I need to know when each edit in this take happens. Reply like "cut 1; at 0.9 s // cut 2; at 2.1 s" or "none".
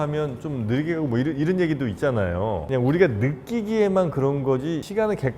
cut 1; at 2.7 s